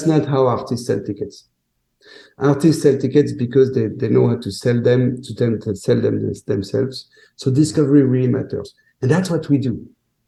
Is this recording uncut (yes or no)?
yes